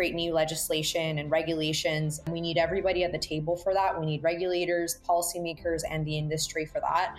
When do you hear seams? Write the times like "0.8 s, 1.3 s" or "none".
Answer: 2.3 s

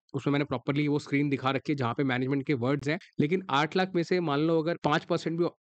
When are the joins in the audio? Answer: 3.0 s, 4.8 s

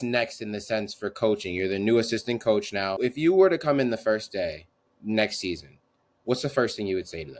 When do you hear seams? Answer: 2.9 s

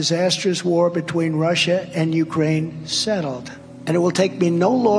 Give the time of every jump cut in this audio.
none

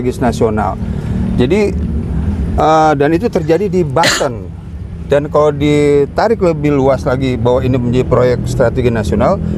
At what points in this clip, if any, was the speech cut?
none

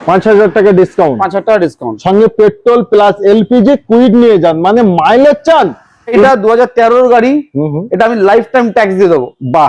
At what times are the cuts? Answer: 6.2 s

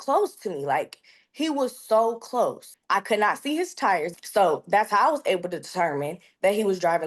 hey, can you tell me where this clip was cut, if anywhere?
2.7 s, 4.2 s

